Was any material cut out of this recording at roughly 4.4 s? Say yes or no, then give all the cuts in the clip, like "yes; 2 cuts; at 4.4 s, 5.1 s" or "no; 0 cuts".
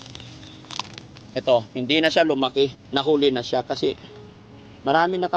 no; 1 cut; at 2.8 s